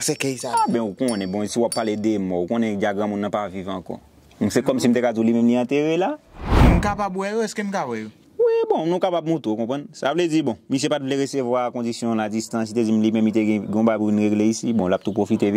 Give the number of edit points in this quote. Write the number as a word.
one